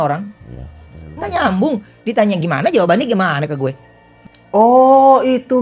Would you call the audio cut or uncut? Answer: uncut